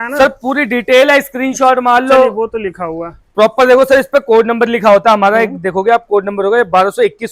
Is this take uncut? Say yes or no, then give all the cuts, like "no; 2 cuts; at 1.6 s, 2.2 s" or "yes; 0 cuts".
yes; 0 cuts